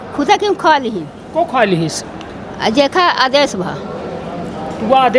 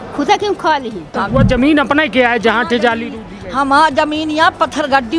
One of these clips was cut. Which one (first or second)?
second